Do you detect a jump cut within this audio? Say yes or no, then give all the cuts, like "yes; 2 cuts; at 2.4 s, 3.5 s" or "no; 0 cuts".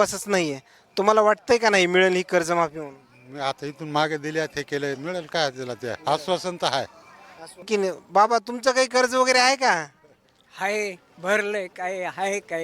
yes; 1 cut; at 7.7 s